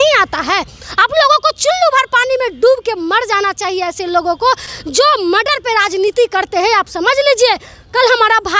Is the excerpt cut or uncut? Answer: uncut